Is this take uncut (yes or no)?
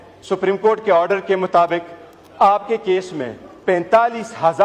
yes